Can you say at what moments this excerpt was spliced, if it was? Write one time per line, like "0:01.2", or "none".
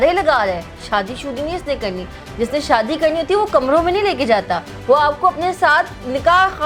none